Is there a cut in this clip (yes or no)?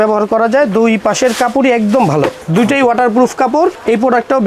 no